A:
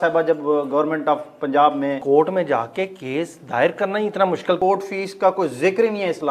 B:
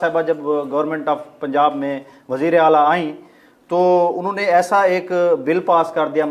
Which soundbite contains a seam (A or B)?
A